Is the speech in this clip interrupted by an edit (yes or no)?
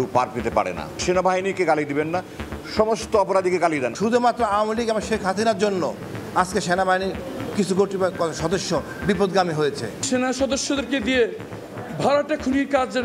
yes